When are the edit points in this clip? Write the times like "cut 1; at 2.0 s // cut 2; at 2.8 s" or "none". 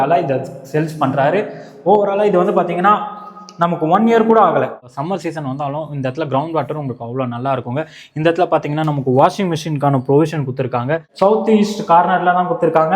cut 1; at 4.9 s // cut 2; at 11.0 s